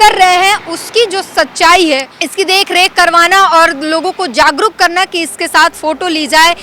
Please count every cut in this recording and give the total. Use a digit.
1